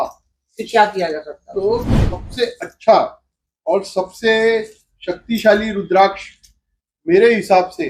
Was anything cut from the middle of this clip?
no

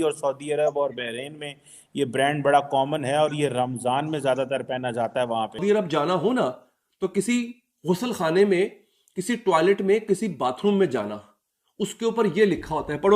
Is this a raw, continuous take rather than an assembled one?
no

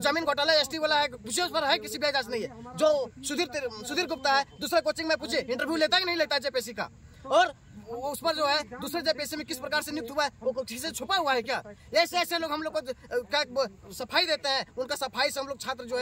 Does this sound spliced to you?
no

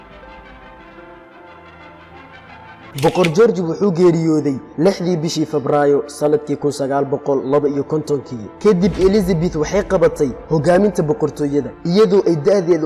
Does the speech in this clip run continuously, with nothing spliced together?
yes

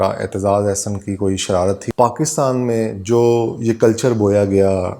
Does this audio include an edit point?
yes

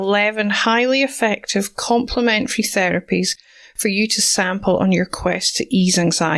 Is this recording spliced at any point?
no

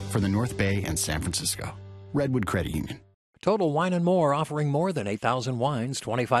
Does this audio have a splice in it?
yes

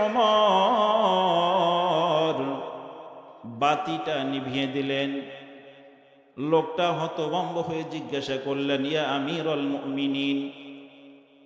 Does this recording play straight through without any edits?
yes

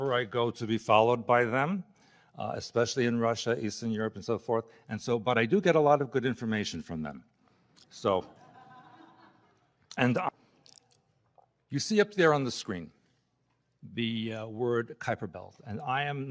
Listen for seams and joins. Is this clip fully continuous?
yes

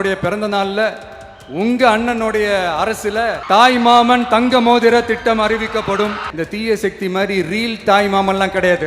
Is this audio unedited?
no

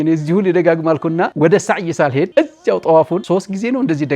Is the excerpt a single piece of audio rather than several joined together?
no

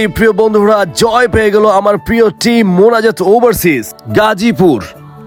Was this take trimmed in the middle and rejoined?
no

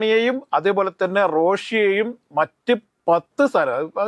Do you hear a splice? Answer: no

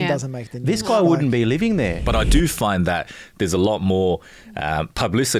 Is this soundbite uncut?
no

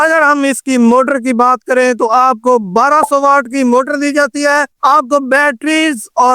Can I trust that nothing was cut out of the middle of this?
no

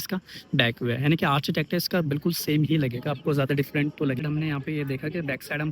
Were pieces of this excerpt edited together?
yes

